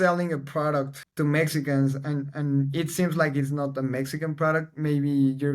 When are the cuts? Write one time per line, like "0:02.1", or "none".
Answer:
0:01.0